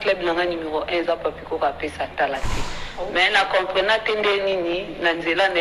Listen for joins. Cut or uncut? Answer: uncut